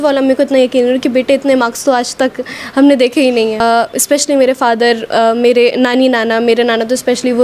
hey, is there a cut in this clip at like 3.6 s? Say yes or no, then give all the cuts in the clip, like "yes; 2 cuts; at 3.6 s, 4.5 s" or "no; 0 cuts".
yes; 1 cut; at 3.6 s